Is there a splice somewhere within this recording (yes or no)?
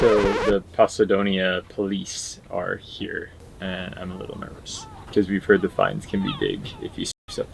yes